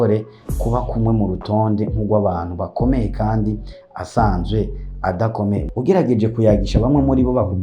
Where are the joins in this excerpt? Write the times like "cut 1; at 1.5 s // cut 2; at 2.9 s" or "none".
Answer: cut 1; at 5.7 s